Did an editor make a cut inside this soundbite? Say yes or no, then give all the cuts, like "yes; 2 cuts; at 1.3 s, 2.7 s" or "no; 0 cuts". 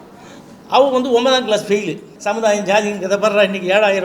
yes; 1 cut; at 2.1 s